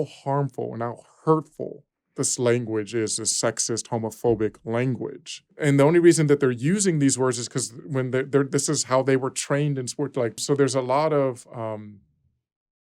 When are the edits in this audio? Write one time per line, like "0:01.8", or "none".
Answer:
0:05.5
0:10.4